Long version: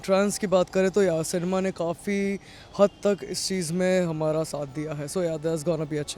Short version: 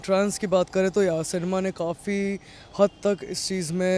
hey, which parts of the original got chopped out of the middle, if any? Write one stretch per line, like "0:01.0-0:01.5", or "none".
none